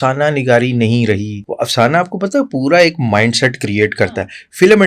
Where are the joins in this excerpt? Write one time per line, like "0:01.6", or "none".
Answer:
0:01.4